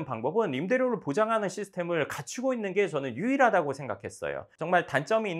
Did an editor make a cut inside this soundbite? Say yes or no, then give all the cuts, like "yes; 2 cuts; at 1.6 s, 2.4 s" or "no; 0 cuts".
yes; 1 cut; at 4.5 s